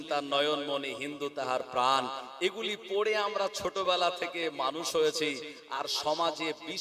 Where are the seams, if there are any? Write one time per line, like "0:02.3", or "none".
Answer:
0:05.6